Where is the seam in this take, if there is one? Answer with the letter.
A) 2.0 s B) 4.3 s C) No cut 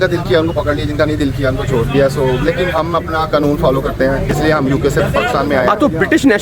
C